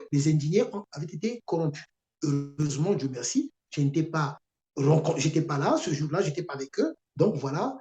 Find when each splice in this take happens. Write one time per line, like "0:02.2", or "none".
0:02.5